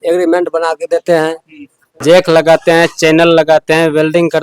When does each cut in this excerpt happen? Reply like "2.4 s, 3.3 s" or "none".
1.9 s